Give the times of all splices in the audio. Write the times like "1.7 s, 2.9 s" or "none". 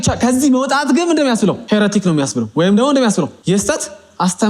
1.6 s, 3.4 s